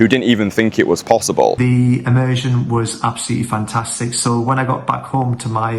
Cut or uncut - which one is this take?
cut